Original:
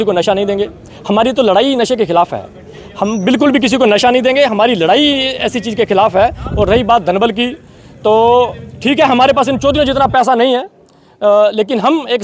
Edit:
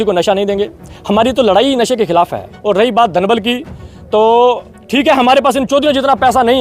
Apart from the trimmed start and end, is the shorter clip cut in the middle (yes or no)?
yes